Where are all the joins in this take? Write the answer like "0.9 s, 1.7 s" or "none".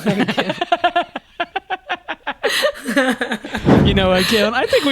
3.7 s